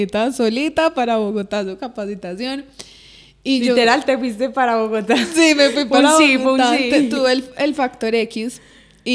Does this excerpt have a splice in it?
no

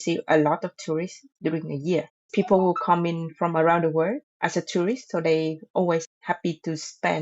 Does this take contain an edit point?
yes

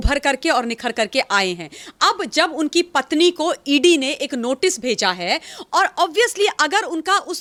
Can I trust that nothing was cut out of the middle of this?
yes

